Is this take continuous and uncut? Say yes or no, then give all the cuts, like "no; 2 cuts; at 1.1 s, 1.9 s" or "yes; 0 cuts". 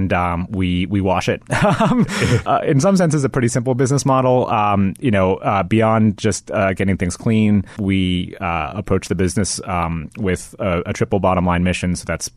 no; 2 cuts; at 2.4 s, 7.8 s